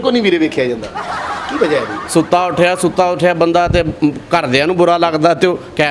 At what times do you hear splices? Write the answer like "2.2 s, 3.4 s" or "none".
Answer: 2.0 s